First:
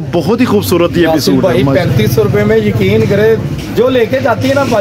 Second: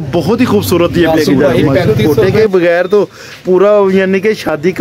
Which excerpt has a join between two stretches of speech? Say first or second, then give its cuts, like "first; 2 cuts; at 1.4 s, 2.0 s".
second; 1 cut; at 1.9 s